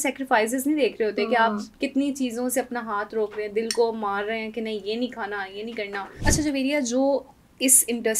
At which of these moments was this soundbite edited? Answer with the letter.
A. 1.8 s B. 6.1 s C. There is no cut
B